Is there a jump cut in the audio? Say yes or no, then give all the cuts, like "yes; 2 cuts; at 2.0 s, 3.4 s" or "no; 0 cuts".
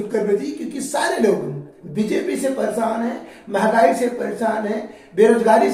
no; 0 cuts